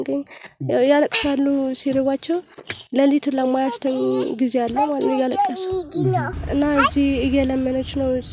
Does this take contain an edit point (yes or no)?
yes